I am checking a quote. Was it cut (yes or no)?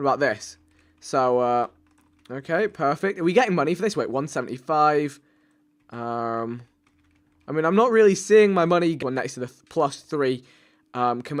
no